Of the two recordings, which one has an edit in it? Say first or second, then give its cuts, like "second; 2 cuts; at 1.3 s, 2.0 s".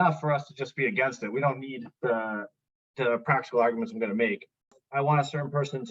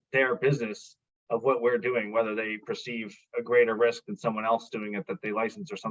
first; 1 cut; at 4.8 s